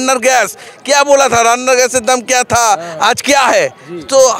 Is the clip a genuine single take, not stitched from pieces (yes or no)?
yes